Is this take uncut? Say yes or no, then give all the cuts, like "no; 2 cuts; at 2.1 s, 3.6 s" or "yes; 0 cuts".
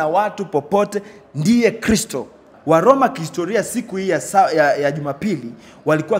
no; 1 cut; at 2.5 s